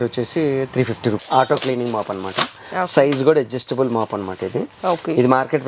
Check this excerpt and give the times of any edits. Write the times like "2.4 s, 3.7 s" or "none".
1.2 s